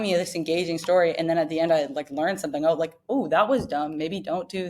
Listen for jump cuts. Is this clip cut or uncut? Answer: uncut